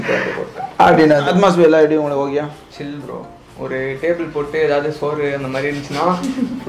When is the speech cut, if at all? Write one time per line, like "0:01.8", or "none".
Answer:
0:01.2